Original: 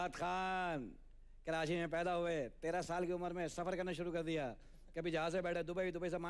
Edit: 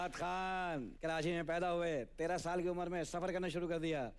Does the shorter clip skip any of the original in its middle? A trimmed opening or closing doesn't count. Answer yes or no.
yes